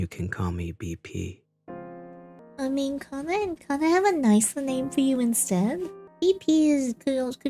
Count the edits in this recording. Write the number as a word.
zero